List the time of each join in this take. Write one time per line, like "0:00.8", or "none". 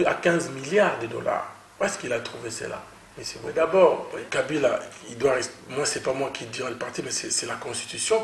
0:03.5